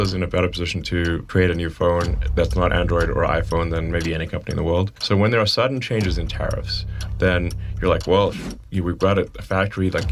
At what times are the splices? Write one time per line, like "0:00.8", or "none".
0:01.2
0:05.0